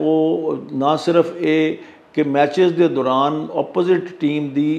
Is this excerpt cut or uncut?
uncut